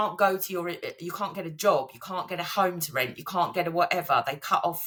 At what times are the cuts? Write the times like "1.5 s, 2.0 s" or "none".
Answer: none